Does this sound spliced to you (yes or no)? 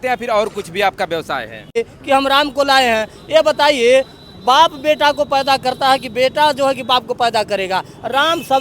yes